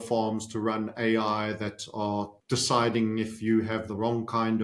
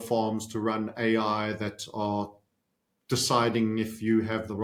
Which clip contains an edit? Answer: first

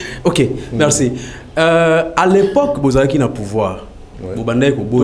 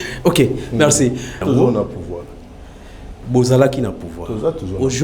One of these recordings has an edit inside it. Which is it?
second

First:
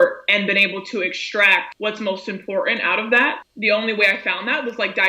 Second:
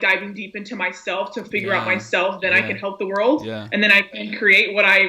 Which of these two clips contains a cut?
first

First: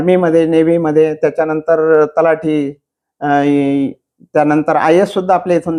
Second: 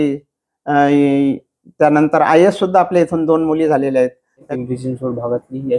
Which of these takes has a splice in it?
second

